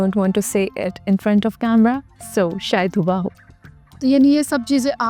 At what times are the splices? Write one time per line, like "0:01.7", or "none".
none